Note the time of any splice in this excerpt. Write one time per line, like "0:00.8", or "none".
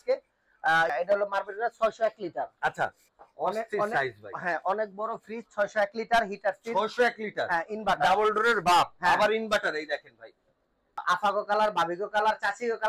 0:00.9
0:03.1
0:11.0